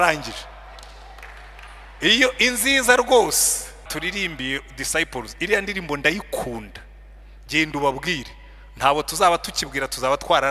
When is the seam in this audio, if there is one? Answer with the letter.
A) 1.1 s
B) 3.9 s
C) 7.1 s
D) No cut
B